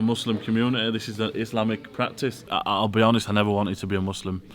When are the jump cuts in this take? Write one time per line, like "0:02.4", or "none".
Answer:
0:02.5